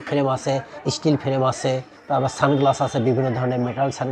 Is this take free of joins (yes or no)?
yes